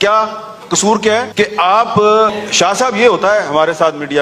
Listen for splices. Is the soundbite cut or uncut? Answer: cut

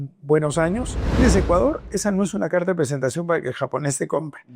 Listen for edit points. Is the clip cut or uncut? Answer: cut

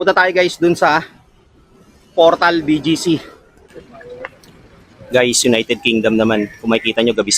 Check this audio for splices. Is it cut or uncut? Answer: cut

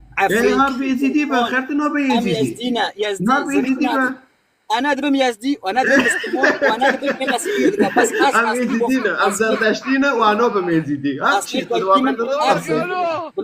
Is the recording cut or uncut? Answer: uncut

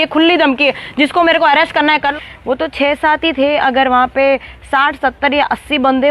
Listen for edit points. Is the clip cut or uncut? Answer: cut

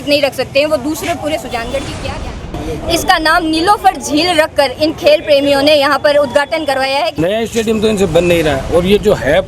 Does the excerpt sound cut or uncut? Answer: cut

